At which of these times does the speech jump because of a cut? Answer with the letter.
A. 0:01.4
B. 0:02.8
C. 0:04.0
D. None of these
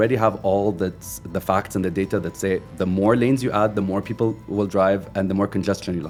D